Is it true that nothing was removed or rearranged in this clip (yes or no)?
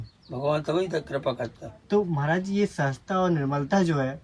yes